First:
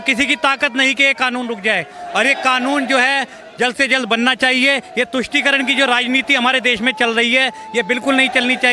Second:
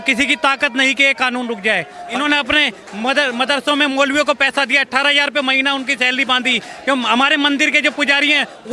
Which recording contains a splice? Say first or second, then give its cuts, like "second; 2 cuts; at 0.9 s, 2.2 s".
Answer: second; 1 cut; at 2.0 s